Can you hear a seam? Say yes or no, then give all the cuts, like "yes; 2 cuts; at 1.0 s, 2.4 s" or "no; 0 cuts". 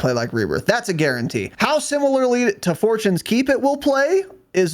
yes; 1 cut; at 1.5 s